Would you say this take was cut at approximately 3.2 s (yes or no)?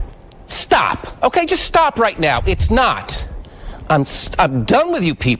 yes